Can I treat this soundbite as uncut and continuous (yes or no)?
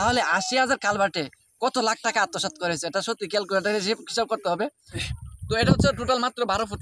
no